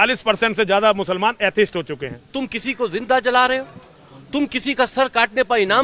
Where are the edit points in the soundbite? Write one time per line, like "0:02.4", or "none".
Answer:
0:02.3